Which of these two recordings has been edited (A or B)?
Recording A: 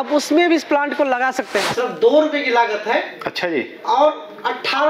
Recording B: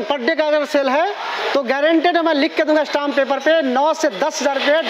A